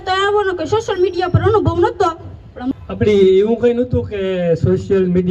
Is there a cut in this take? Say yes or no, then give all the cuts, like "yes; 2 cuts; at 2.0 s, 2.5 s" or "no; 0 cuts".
yes; 1 cut; at 2.7 s